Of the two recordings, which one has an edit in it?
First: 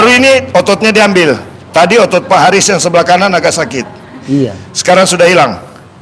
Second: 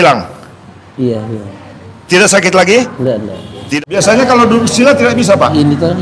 second; 1 cut; at 3.6 s

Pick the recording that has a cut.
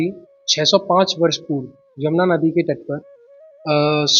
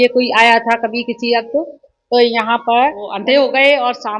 second; 1 cut; at 3.1 s

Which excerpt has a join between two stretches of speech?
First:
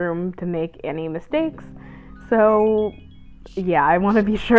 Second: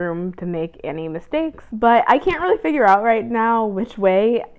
second; 1 cut; at 1.7 s

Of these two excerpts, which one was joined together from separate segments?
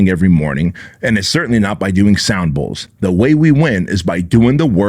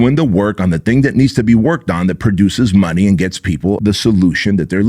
second; 1 cut; at 3.8 s

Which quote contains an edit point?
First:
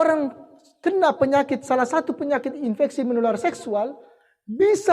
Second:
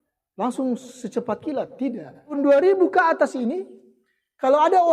second; 1 cut; at 2.3 s

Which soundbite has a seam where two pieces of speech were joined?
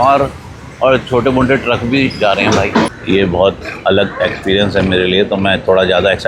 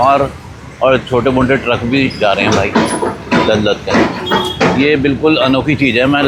first; 1 cut; at 2.9 s

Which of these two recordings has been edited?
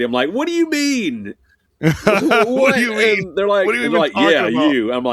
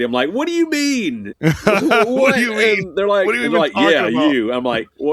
second; 1 cut; at 1.3 s

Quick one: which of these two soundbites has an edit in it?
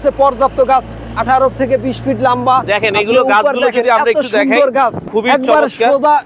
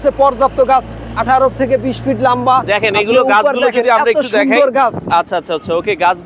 first; 1 cut; at 5.1 s

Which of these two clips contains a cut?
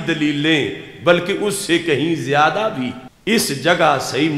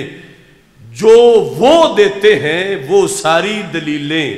first; 1 cut; at 3.1 s

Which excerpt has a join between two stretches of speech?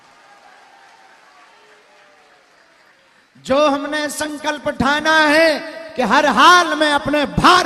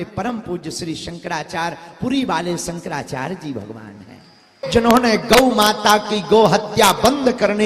second; 1 cut; at 4.6 s

